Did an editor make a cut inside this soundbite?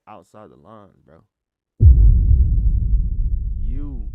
no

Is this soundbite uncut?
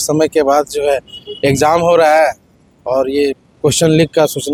yes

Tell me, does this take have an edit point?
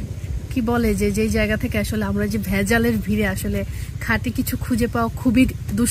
no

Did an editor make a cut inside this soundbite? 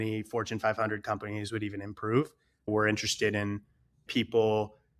yes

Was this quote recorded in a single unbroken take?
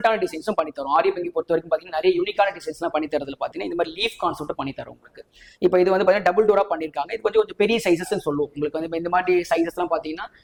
yes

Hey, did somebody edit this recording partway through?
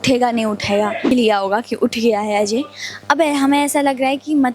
yes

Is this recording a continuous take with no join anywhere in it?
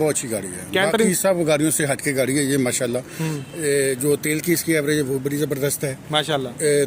yes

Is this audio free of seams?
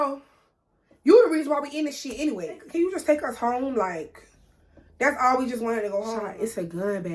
no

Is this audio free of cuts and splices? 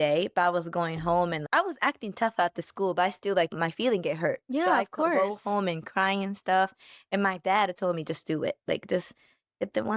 yes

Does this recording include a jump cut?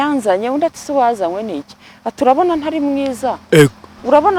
no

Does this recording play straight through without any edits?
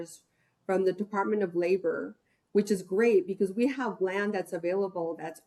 yes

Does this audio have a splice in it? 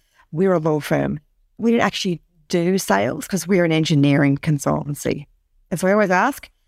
yes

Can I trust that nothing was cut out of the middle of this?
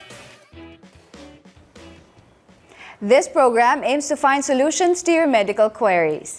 yes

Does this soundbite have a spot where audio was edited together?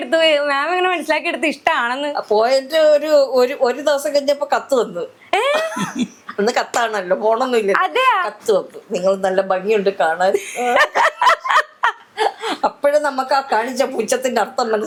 no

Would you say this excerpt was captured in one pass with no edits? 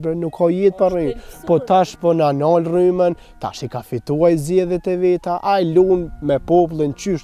yes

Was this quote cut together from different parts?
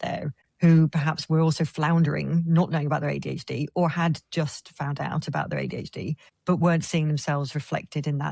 no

